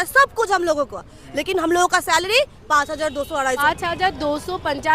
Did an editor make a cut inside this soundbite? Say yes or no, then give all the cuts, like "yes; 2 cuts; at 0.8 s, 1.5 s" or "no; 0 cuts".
yes; 1 cut; at 3.6 s